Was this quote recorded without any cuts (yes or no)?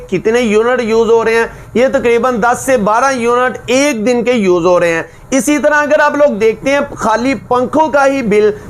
yes